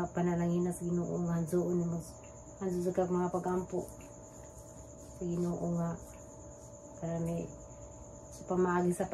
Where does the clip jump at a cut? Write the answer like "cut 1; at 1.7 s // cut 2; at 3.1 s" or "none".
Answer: none